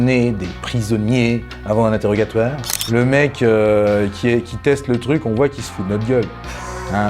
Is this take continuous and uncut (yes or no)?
no